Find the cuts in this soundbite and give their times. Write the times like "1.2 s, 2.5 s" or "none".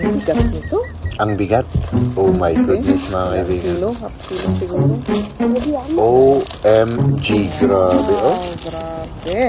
none